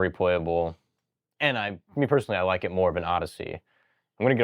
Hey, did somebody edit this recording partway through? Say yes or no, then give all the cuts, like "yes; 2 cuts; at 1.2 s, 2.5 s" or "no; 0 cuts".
no; 0 cuts